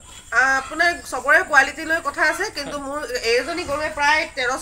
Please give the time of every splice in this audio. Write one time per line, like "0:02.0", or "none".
none